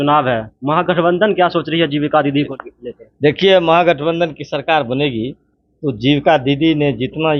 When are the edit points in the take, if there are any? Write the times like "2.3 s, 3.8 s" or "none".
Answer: 2.5 s